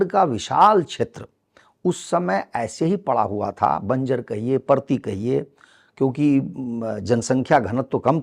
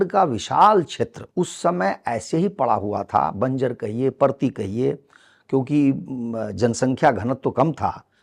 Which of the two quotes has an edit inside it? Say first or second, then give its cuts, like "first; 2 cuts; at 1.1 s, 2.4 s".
second; 1 cut; at 1.2 s